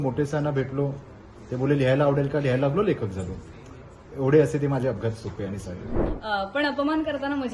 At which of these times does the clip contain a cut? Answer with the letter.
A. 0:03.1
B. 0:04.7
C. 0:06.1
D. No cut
C